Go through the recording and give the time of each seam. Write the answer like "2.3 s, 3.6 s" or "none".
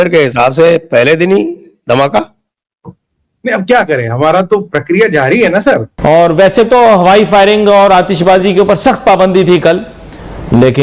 5.9 s